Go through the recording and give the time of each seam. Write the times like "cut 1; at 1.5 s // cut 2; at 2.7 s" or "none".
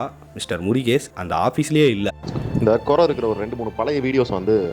cut 1; at 2.2 s